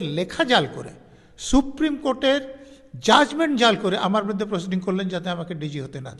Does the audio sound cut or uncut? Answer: uncut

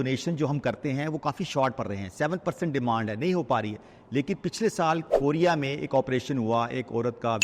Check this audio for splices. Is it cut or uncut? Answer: uncut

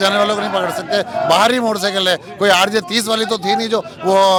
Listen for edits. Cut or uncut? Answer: uncut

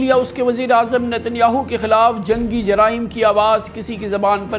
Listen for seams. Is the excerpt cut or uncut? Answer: uncut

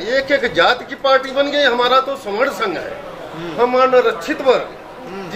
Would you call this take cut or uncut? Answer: uncut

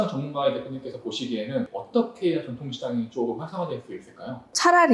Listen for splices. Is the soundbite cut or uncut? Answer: uncut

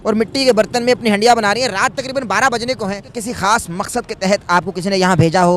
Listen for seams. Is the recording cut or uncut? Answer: cut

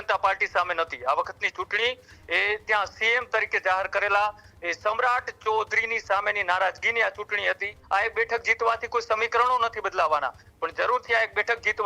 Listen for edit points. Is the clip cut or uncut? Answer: cut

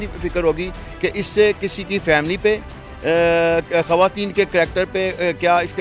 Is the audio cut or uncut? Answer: uncut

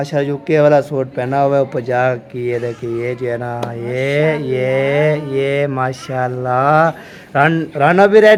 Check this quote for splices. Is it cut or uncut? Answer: uncut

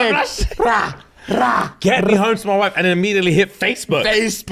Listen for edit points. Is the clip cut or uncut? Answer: uncut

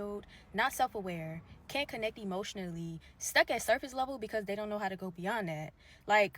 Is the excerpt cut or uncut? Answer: cut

